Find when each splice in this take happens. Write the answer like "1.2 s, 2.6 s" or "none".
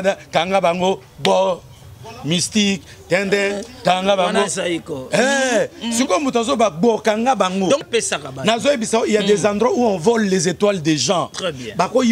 7.8 s